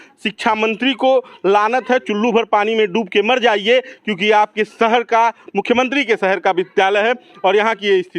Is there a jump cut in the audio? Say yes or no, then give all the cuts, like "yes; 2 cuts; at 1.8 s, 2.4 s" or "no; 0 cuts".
no; 0 cuts